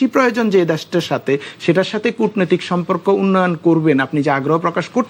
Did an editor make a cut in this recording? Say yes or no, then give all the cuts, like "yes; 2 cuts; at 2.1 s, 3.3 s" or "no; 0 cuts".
no; 0 cuts